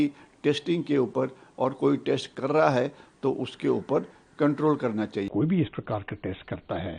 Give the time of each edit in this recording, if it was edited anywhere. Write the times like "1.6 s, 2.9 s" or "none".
5.3 s